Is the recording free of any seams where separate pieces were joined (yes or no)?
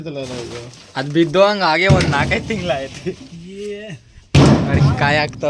yes